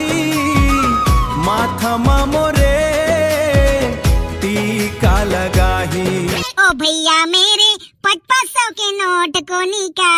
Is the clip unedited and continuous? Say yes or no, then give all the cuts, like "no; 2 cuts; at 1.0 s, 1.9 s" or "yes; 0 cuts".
no; 1 cut; at 6.4 s